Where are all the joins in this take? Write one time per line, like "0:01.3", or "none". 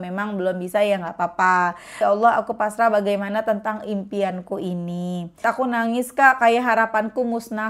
0:02.0
0:05.4

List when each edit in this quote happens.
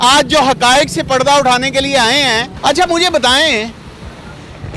0:02.5

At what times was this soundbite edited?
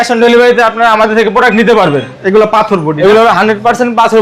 0:02.1

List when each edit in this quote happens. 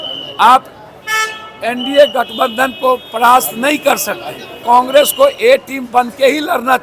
0:04.6

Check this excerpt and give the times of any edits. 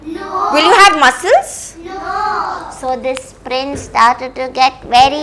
none

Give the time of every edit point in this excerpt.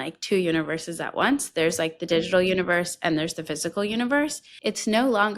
0:04.5

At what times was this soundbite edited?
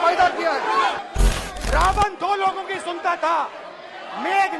0:01.0

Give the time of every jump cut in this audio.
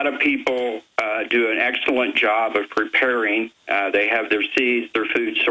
0:04.1

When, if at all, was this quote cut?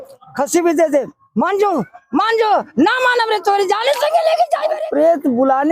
0:04.8

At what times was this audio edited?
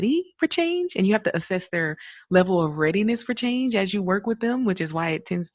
none

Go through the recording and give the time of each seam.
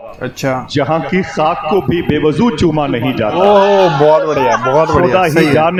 none

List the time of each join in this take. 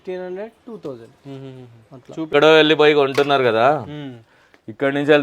0:02.3

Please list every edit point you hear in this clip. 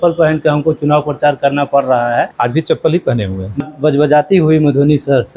0:02.3
0:03.6

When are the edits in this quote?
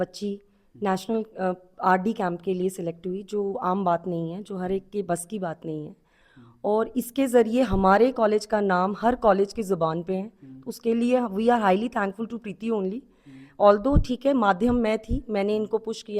none

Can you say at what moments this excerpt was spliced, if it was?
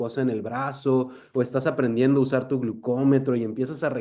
none

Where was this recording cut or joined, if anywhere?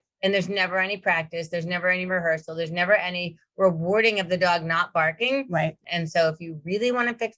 0:05.8

